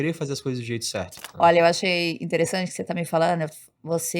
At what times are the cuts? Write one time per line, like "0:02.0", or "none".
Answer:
0:01.2